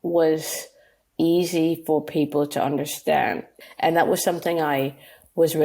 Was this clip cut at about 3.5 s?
yes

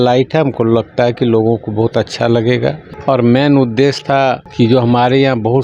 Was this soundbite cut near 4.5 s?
yes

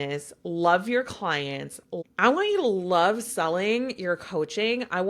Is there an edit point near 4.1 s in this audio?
no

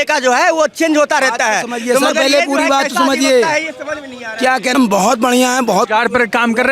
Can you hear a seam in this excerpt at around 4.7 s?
yes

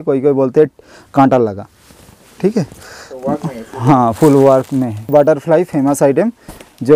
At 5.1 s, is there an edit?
yes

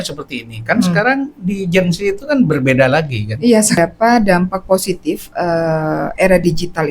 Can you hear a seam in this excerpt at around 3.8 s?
yes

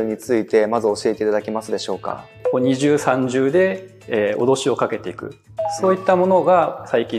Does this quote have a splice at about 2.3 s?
yes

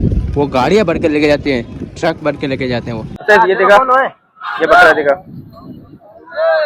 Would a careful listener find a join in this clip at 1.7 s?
no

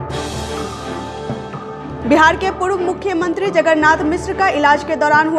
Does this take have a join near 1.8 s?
yes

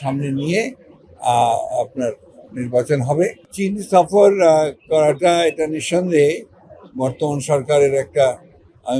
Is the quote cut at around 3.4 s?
yes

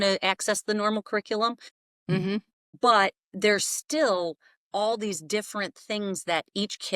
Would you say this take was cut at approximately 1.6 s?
no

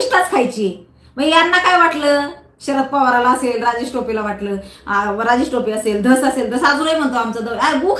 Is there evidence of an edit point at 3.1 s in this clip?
no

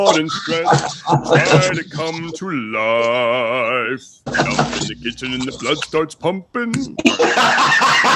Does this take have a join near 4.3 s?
yes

